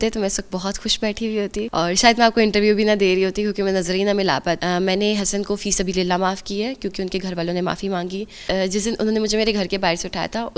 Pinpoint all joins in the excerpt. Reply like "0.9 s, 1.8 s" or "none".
1.7 s, 4.6 s, 8.4 s